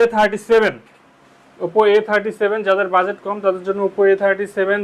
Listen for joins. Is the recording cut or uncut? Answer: uncut